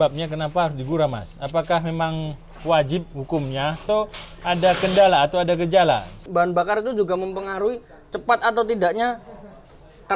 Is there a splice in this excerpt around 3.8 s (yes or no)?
yes